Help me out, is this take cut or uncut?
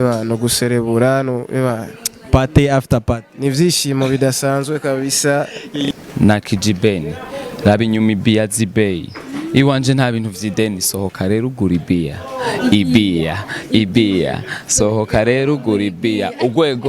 cut